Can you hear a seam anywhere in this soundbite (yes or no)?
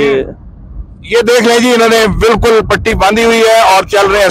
no